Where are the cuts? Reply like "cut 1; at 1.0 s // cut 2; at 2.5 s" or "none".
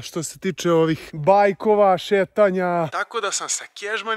cut 1; at 1.0 s // cut 2; at 2.9 s